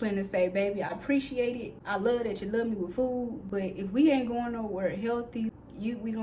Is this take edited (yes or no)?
yes